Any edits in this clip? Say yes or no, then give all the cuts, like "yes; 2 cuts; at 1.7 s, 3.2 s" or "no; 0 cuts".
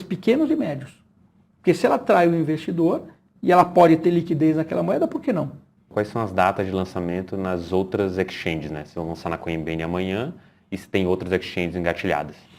yes; 1 cut; at 5.9 s